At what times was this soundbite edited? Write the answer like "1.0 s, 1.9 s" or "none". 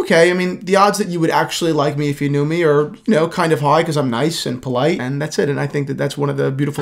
5.0 s